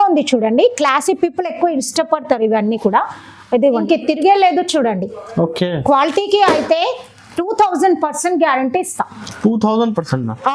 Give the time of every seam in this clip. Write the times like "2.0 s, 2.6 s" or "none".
3.8 s